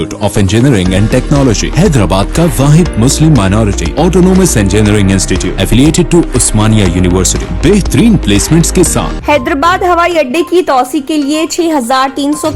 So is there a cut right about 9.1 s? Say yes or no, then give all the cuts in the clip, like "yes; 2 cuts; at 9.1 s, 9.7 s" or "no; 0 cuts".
yes; 1 cut; at 9.1 s